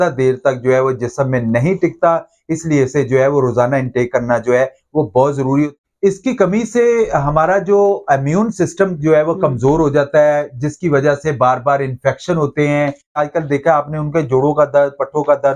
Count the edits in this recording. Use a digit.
2